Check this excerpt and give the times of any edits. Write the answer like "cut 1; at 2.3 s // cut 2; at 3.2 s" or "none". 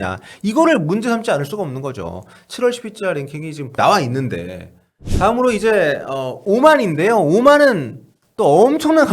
cut 1; at 5.0 s